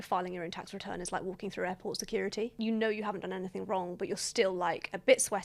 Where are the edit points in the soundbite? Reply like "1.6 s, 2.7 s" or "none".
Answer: none